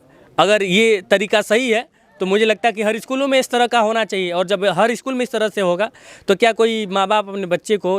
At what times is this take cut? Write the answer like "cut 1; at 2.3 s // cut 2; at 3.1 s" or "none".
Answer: none